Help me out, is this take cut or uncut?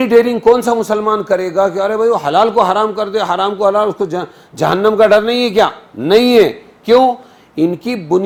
uncut